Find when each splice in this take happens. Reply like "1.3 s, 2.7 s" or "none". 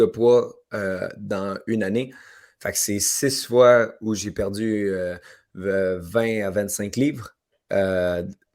none

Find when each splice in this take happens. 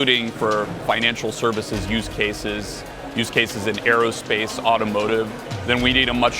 5.5 s

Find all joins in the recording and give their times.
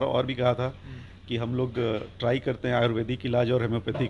none

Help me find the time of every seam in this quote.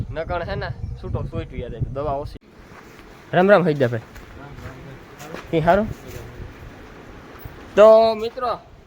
2.3 s

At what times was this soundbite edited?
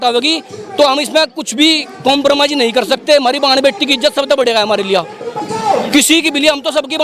none

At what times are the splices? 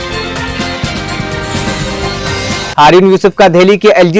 2.7 s

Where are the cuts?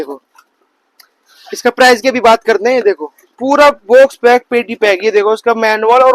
none

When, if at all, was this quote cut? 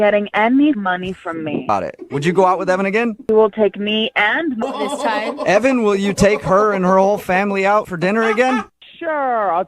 1.7 s, 3.3 s, 4.6 s

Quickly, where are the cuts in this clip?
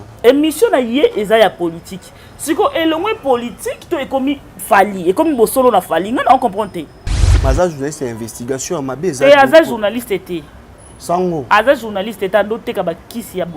7.3 s

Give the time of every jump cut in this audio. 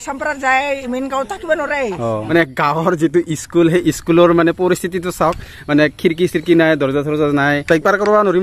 2.2 s, 7.6 s

